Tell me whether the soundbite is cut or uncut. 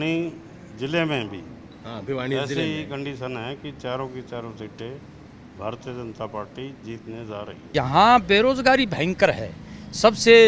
cut